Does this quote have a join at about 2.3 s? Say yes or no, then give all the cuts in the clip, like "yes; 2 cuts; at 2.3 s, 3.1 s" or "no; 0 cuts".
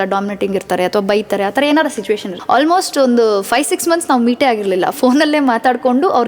yes; 1 cut; at 2.3 s